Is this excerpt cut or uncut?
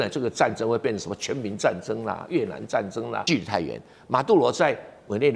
cut